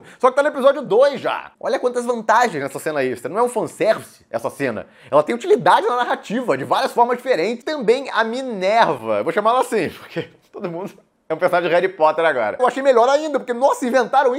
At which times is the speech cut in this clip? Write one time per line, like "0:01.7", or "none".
0:01.5
0:07.7
0:12.6